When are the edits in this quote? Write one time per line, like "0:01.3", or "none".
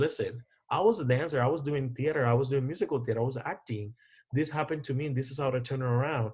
none